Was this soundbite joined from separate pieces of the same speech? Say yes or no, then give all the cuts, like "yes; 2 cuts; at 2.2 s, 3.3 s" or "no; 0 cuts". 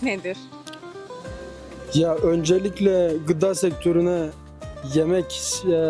no; 0 cuts